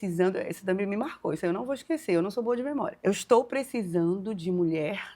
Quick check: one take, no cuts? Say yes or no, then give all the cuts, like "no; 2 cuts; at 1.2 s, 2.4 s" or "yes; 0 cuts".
no; 1 cut; at 2.9 s